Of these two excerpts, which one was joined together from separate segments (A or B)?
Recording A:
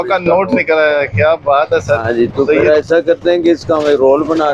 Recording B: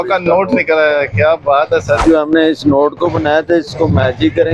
B